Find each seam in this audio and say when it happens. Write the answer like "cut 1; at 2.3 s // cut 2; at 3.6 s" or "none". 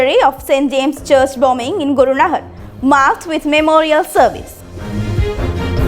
cut 1; at 4.9 s

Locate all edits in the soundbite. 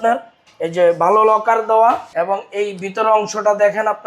cut 1; at 2.1 s

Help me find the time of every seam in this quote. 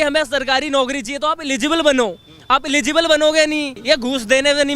cut 1; at 3.7 s

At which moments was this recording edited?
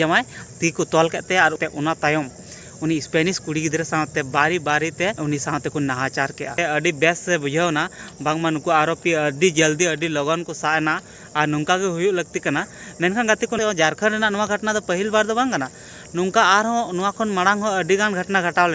cut 1; at 1.6 s // cut 2; at 5.2 s // cut 3; at 6.6 s // cut 4; at 13.6 s

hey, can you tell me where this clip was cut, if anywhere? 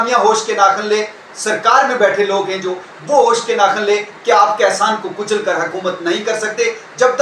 none

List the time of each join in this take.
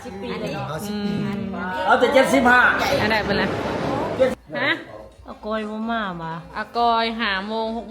cut 1; at 4.3 s

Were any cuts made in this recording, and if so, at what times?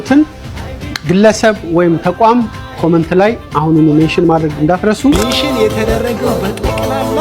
cut 1; at 5.1 s

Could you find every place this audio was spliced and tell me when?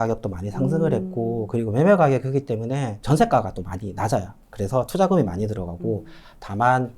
cut 1; at 3.0 s // cut 2; at 4.4 s

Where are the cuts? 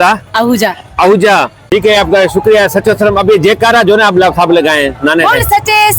none

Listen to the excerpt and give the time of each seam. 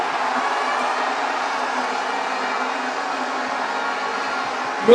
none

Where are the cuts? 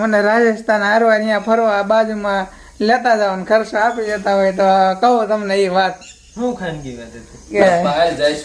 cut 1; at 7.5 s

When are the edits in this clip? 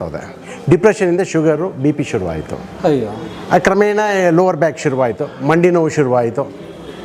none

